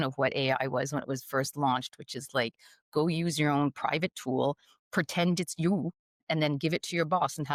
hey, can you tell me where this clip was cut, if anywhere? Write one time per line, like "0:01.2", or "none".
none